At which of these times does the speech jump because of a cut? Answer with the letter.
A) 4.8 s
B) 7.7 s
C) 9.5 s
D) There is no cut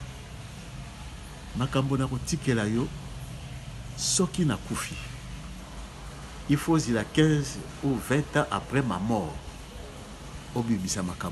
D